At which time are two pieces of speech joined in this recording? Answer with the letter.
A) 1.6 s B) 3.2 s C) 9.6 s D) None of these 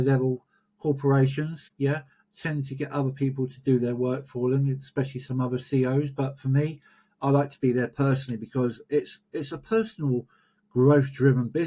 A